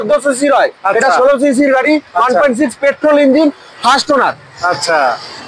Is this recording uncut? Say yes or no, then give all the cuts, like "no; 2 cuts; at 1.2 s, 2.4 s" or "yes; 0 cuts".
yes; 0 cuts